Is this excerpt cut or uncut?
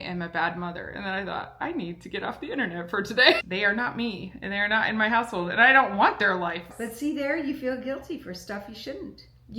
cut